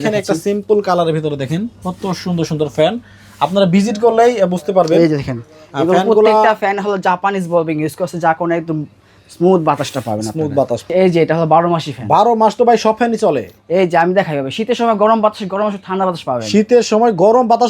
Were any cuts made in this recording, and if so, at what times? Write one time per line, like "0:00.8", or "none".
0:10.8